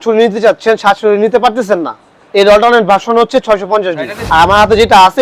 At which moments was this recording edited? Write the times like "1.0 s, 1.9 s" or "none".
4.1 s